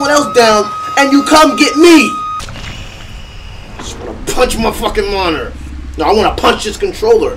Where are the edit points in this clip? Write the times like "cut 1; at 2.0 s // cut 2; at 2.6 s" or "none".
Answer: cut 1; at 2.4 s